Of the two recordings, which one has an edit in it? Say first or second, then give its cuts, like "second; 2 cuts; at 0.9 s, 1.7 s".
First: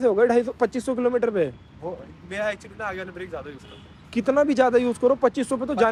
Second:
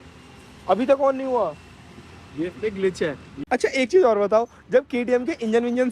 second; 1 cut; at 3.3 s